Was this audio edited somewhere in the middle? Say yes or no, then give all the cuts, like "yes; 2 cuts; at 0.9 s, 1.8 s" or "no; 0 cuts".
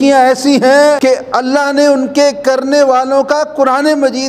yes; 1 cut; at 1.0 s